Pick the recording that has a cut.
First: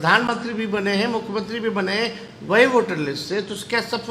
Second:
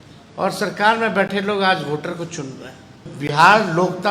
second; 1 cut; at 3.1 s

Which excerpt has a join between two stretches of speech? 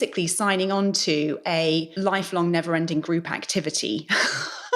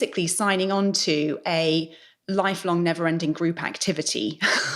first; 1 cut; at 1.9 s

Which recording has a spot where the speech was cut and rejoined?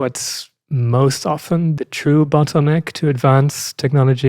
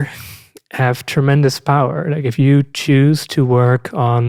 first; 1 cut; at 1.8 s

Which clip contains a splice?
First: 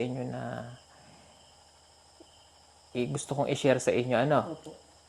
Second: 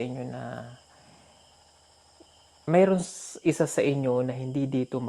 second; 1 cut; at 2.6 s

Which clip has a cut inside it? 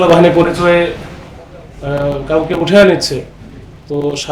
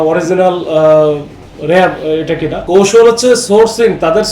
second; 1 cut; at 2.6 s

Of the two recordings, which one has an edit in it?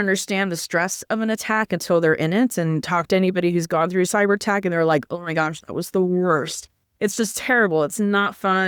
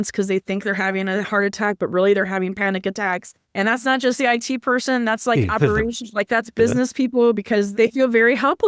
second; 2 cuts; at 3.4 s, 7.7 s

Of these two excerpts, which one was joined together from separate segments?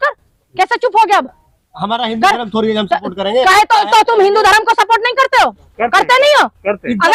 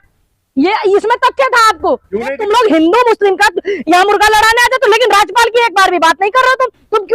second; 1 cut; at 2.4 s

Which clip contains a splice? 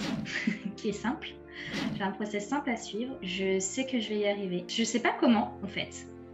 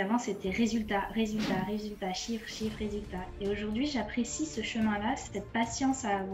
first; 2 cuts; at 3.2 s, 4.7 s

